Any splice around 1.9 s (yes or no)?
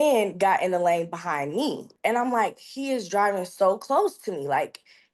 yes